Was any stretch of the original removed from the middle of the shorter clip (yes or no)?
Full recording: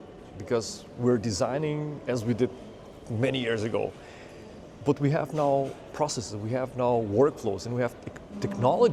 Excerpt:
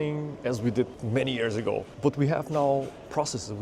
yes